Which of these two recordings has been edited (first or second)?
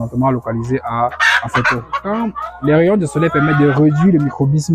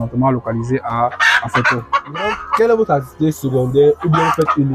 first